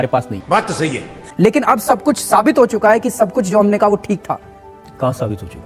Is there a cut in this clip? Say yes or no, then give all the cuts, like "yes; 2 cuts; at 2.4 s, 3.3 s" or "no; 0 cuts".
no; 0 cuts